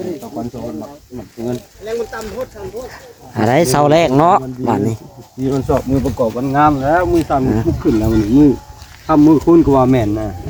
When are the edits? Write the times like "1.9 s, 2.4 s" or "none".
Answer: none

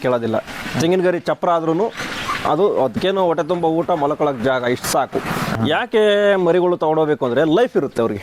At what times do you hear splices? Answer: 5.5 s

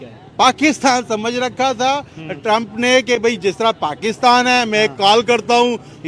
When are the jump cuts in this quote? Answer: none

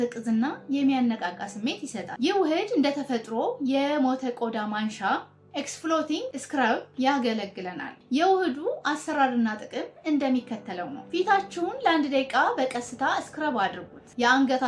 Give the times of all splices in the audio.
2.1 s

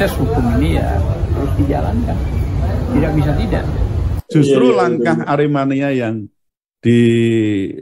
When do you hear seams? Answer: 4.1 s

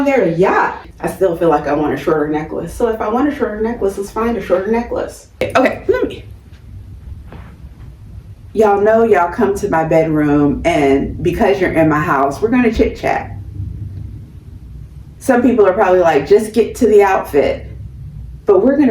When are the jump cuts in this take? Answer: 0.9 s, 5.4 s

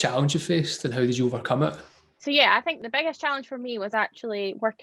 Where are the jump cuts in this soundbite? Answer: 1.9 s, 2.8 s

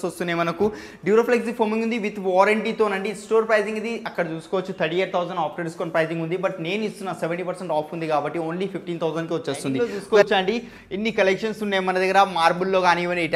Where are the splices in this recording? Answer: 10.0 s

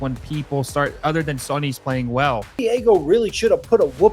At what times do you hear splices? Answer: 2.6 s

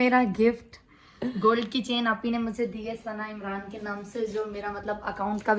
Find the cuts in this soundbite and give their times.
none

